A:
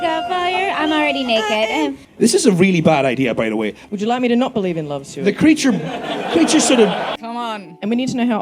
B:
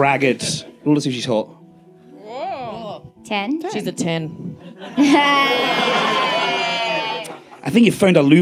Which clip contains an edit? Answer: A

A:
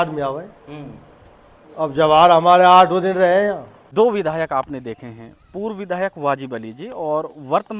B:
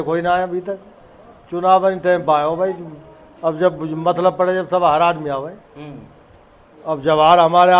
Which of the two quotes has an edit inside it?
A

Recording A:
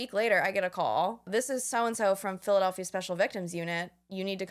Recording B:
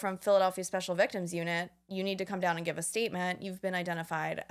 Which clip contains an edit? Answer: A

